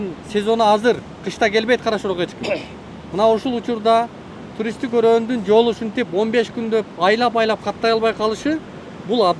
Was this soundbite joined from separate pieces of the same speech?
no; 0 cuts

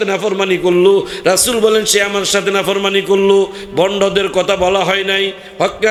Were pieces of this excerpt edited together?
no; 0 cuts

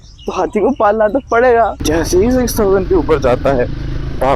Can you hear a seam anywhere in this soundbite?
yes; 1 cut; at 1.8 s

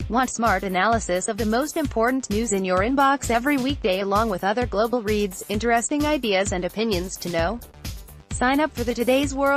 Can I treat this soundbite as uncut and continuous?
yes; 0 cuts

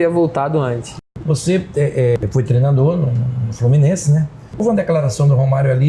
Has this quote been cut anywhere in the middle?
yes; 3 cuts; at 0.9 s, 2.2 s, 4.6 s

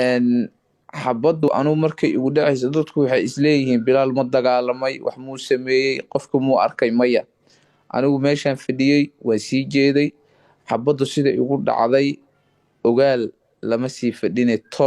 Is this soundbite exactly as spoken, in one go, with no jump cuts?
no; 1 cut; at 1.5 s

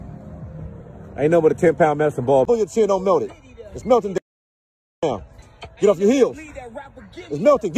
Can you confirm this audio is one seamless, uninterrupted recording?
no; 1 cut; at 2.5 s

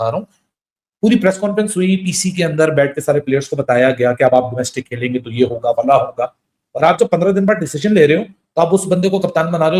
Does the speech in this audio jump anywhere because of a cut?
no; 0 cuts

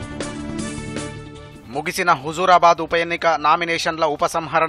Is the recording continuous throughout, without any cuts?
yes; 0 cuts

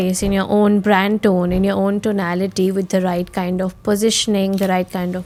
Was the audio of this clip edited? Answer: no; 0 cuts

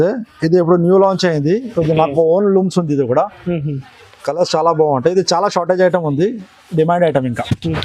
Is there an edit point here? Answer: no; 0 cuts

